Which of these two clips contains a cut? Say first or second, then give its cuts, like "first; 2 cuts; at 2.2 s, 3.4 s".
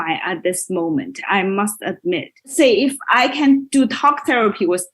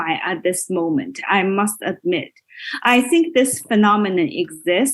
first; 1 cut; at 2.4 s